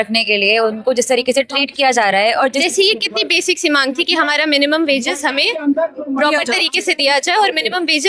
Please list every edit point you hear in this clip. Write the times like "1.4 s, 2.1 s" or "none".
2.6 s